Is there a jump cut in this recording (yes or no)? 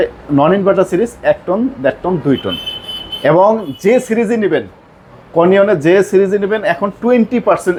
no